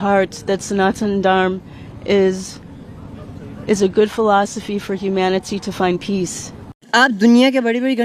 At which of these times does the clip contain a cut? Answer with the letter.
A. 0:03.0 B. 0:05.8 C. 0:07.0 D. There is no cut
C